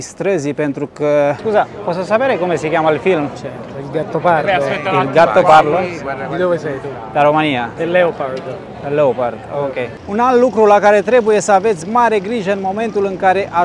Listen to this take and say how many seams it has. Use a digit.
3